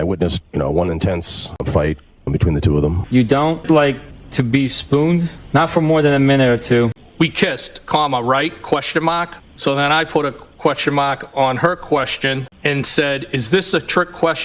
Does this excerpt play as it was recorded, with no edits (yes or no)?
no